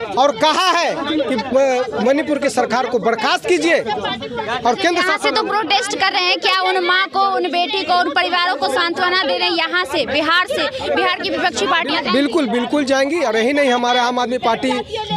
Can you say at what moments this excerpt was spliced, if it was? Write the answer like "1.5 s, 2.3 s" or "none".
none

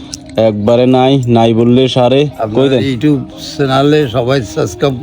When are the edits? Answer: 2.4 s

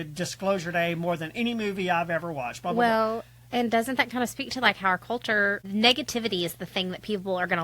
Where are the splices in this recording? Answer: 5.7 s

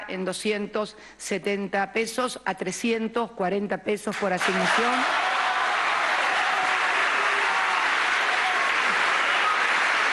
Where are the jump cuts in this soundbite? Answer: none

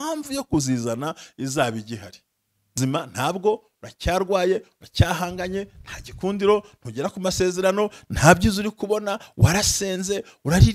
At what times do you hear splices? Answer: 2.8 s

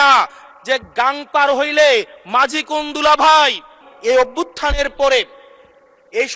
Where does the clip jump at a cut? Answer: 3.8 s

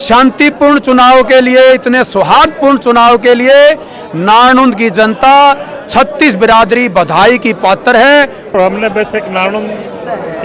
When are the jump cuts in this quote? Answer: 8.5 s

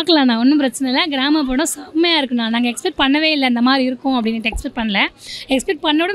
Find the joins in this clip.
none

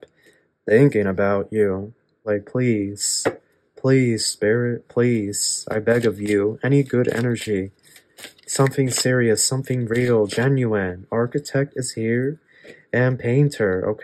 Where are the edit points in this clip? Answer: 2.2 s

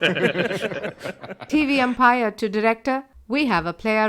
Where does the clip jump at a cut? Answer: 1.4 s

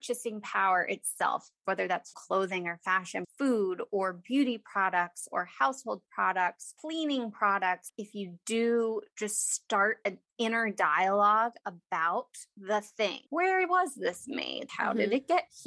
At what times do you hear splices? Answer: none

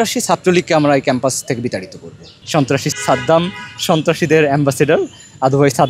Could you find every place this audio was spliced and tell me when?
2.8 s

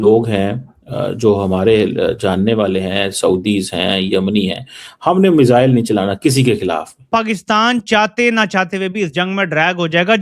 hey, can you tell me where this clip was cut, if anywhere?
7.1 s

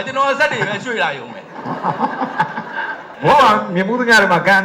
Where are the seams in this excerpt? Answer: 3.0 s

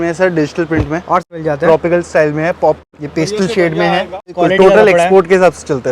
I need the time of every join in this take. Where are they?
1.3 s, 2.9 s, 4.4 s

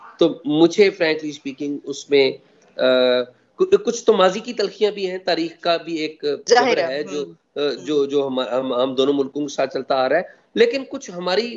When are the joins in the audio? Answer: none

